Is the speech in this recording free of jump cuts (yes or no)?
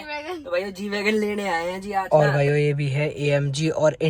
no